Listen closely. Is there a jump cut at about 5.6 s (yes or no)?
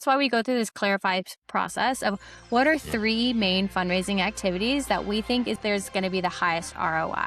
yes